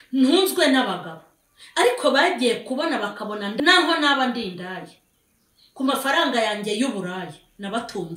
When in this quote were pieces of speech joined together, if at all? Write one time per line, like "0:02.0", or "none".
0:03.5